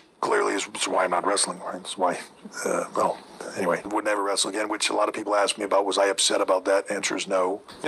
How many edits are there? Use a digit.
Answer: 0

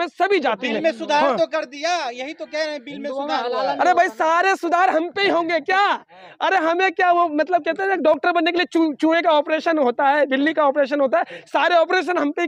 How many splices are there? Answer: 0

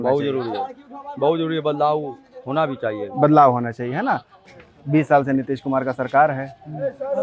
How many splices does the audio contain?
1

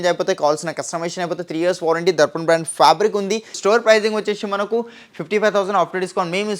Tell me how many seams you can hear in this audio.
1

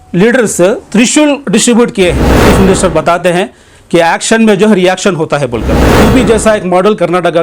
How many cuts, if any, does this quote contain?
2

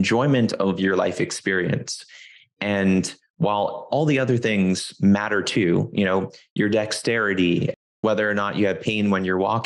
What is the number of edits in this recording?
1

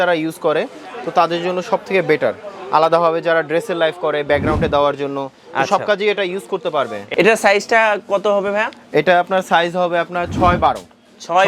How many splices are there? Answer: 1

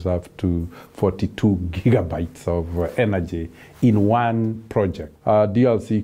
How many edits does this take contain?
1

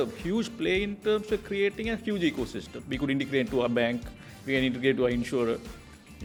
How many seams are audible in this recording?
0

